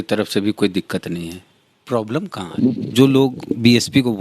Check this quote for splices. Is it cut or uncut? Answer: cut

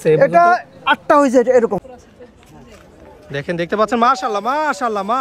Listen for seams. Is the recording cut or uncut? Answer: cut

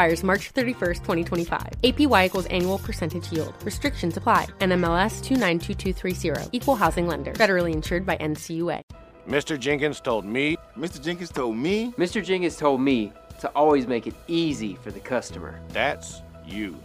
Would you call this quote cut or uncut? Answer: cut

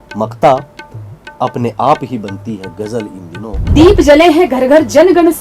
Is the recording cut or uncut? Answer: cut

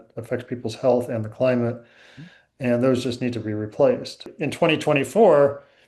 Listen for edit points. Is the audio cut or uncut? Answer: cut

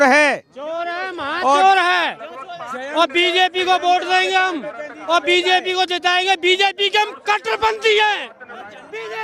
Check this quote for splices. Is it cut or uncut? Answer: uncut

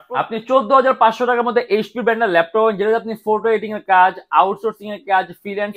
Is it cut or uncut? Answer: uncut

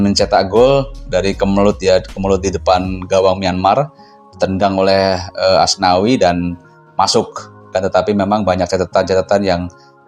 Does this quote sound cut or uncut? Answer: cut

